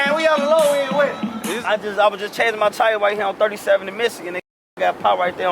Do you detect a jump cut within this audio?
yes; 1 cut; at 1.4 s

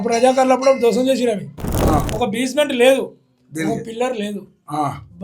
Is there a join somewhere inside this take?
yes; 1 cut; at 1.7 s

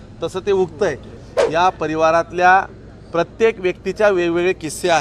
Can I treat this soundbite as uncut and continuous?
no; 1 cut; at 1.1 s

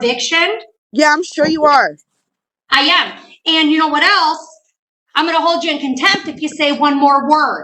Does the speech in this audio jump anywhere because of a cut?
no; 0 cuts

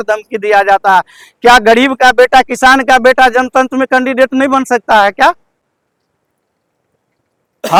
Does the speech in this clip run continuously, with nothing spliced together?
yes; 0 cuts

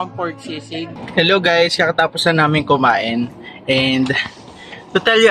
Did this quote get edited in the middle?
yes; 1 cut; at 1.0 s

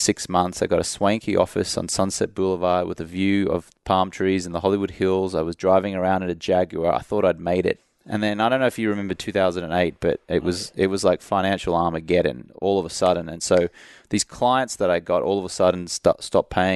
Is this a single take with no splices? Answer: no; 1 cut; at 7.7 s

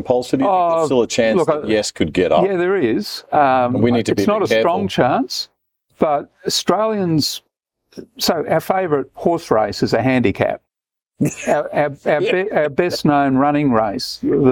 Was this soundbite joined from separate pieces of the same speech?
no; 0 cuts

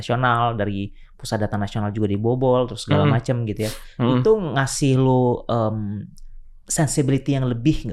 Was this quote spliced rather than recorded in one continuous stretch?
no; 0 cuts

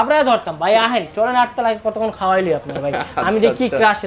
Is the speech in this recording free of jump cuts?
yes; 0 cuts

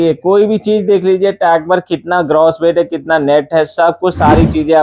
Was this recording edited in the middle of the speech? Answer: no; 0 cuts

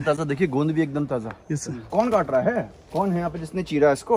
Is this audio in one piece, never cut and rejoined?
no; 2 cuts; at 1.8 s, 2.8 s

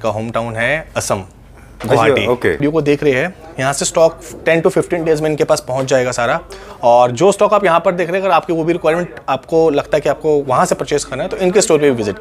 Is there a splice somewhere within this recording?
yes; 1 cut; at 2.6 s

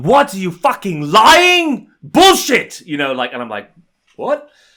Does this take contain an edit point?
no; 0 cuts

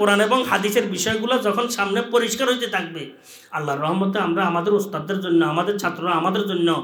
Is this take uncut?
yes; 0 cuts

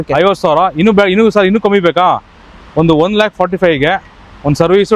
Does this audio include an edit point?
no; 0 cuts

